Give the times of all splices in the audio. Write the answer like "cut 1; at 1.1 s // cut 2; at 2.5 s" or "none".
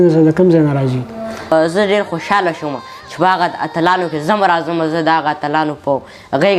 cut 1; at 1.5 s